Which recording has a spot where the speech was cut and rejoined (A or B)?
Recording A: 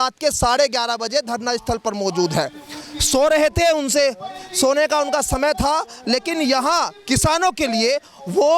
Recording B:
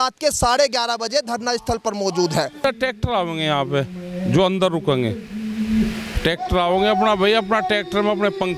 B